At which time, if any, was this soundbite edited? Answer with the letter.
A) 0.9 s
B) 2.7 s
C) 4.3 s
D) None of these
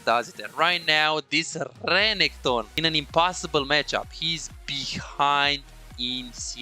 B